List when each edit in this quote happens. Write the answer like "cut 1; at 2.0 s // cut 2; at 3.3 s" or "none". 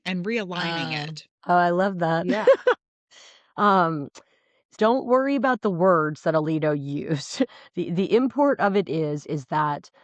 cut 1; at 4.7 s